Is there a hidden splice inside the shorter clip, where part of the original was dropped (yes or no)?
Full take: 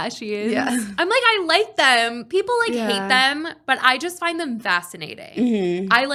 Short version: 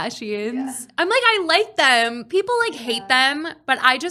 no